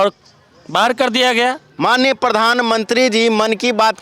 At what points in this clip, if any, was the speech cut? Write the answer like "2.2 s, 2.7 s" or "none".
1.7 s